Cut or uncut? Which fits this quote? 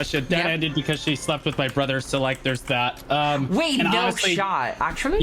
cut